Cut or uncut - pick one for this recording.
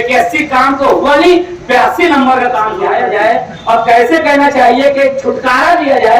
cut